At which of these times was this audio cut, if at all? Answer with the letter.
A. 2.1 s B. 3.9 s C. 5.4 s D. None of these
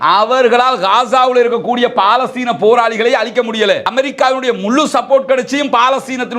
B